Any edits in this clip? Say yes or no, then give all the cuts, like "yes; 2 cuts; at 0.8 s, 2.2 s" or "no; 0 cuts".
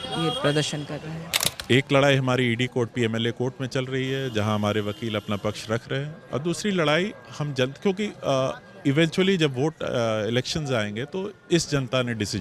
yes; 1 cut; at 1.5 s